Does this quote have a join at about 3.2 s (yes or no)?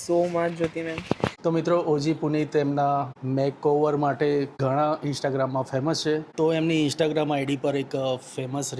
yes